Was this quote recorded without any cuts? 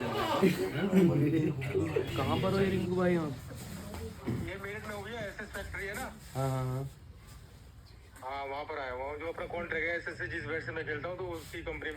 no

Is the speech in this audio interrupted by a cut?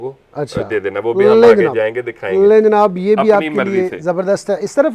no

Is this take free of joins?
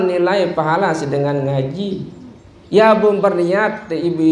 yes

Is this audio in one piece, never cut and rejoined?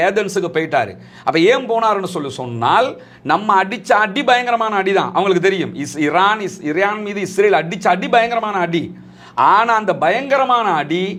yes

